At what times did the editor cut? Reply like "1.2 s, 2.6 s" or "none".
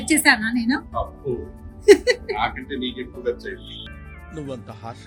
none